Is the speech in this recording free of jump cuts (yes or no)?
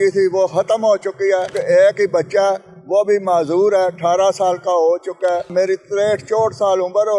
no